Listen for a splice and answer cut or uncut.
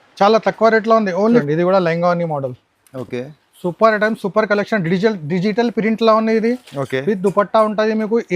cut